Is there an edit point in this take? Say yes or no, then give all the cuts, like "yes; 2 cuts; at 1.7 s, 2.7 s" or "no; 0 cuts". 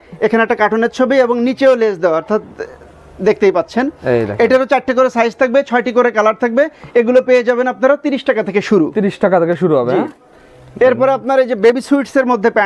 no; 0 cuts